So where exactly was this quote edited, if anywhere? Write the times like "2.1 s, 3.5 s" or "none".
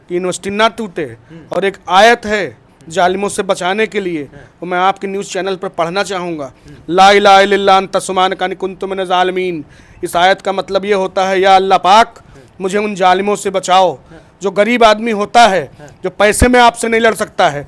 none